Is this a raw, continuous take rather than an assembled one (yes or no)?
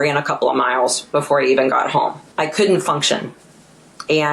no